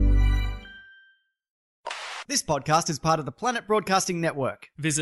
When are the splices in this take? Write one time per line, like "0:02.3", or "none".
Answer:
0:01.8